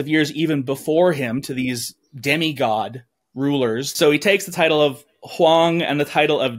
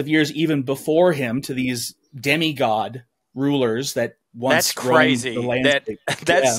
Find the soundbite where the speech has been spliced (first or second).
first